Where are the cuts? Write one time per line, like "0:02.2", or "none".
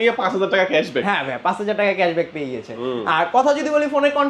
none